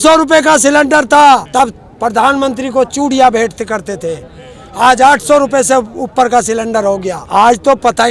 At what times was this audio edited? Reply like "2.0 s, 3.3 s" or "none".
1.5 s, 7.2 s